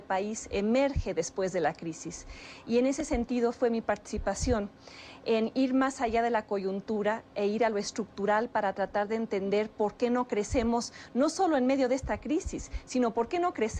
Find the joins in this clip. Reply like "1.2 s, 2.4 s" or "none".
9.1 s